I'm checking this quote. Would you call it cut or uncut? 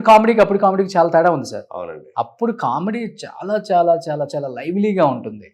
uncut